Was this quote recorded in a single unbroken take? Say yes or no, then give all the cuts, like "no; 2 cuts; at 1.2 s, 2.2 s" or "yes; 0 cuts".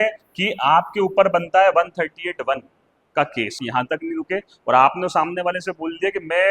no; 1 cut; at 3.6 s